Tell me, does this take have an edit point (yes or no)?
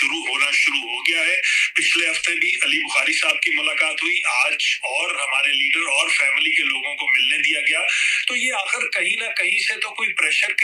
no